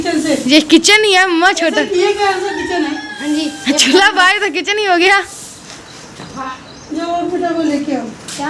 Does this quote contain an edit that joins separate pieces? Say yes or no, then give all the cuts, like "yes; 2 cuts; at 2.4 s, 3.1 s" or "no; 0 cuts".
yes; 1 cut; at 6.5 s